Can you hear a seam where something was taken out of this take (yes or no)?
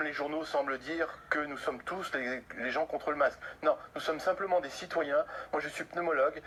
no